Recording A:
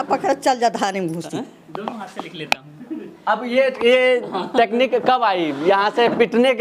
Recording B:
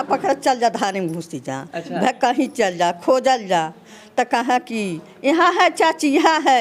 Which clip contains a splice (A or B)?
A